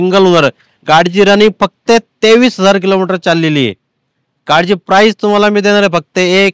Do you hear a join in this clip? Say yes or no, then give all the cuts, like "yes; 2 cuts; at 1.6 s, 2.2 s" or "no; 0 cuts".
no; 0 cuts